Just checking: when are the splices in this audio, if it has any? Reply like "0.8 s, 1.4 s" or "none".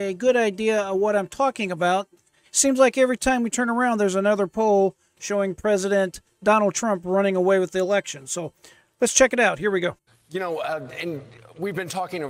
10.1 s